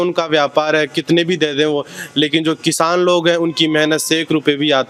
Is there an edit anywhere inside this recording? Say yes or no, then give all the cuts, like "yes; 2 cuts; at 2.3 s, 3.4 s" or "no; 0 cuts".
no; 0 cuts